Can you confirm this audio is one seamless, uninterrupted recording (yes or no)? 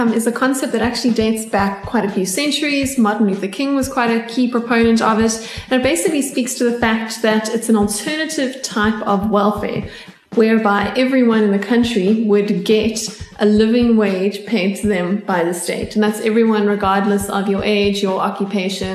yes